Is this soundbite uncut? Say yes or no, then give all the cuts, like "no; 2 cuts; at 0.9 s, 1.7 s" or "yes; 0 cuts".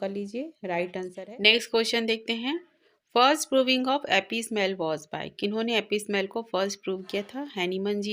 no; 1 cut; at 1.2 s